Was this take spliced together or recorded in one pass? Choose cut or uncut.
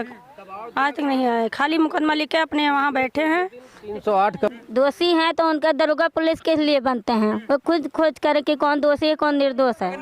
cut